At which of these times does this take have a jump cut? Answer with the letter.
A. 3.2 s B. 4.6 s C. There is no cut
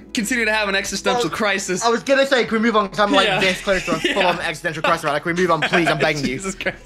C